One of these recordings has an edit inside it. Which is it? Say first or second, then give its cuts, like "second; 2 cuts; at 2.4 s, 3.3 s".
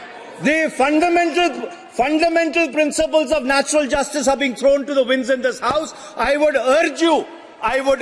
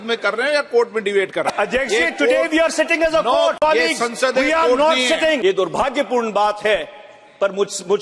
second; 3 cuts; at 1.5 s, 3.6 s, 5.4 s